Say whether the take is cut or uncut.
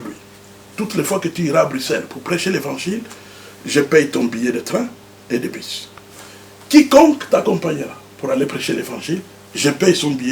uncut